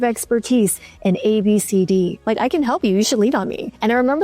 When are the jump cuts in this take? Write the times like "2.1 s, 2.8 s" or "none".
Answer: 2.2 s